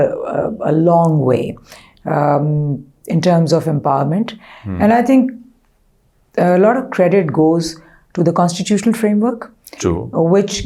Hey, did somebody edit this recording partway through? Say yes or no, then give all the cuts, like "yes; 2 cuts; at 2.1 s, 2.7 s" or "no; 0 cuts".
no; 0 cuts